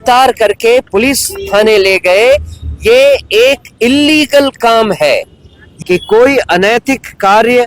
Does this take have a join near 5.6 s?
yes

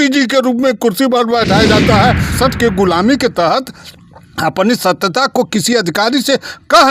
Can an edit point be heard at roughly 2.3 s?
yes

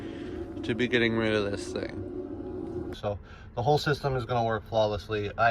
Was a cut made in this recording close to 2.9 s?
yes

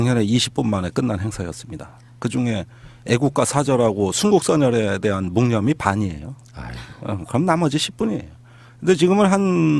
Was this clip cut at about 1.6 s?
yes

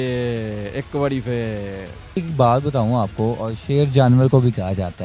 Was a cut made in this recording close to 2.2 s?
yes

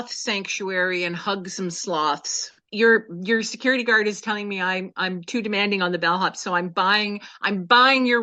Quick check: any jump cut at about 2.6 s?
yes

